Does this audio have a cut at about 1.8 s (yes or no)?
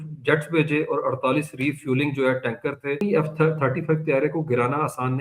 no